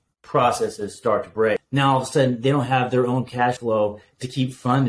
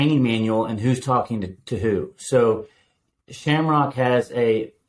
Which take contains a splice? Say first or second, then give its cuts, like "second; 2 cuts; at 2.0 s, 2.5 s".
first; 2 cuts; at 1.6 s, 3.6 s